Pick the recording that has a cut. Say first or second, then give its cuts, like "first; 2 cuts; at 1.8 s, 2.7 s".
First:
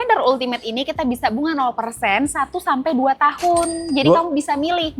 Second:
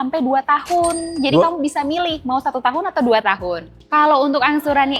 second; 1 cut; at 3.8 s